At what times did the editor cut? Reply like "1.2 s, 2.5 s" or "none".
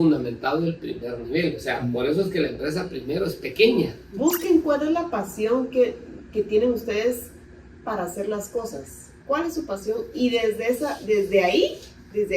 4.0 s